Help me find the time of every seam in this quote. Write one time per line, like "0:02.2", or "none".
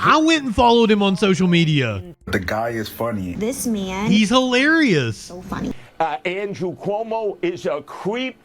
0:02.1
0:05.7